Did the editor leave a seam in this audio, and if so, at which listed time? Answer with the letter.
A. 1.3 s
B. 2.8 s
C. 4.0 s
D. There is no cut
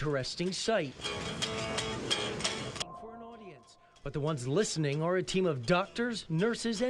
B